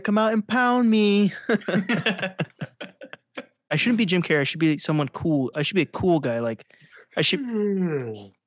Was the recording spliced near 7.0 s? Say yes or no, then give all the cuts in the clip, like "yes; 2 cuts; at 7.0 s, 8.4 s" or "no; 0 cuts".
no; 1 cut; at 3.7 s